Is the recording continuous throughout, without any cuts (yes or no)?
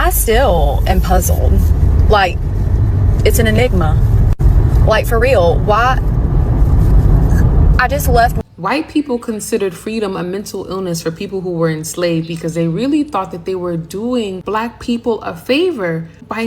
no